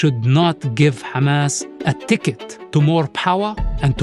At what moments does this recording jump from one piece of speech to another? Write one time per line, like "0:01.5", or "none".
0:01.7
0:02.5